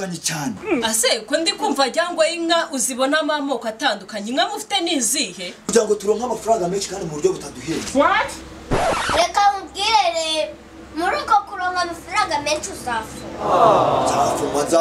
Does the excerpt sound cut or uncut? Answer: cut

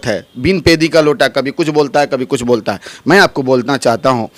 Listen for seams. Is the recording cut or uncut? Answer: uncut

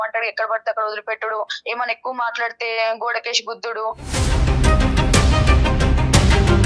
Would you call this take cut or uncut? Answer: uncut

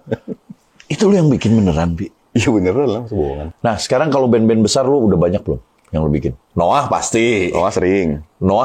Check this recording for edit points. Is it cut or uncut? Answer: cut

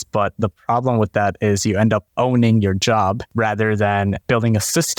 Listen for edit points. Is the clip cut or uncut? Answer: cut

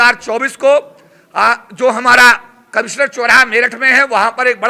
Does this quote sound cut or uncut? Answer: uncut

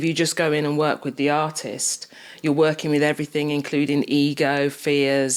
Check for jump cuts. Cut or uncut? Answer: uncut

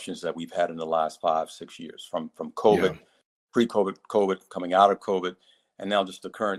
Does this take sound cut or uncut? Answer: uncut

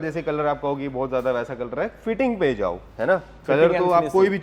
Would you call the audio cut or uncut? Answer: uncut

